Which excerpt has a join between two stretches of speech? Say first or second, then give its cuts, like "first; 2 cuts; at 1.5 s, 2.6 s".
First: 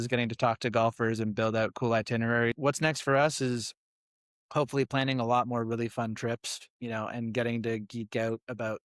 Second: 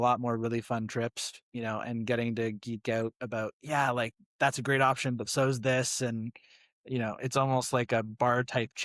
first; 1 cut; at 2.6 s